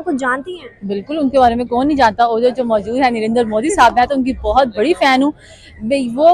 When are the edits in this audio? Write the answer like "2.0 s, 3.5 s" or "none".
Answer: none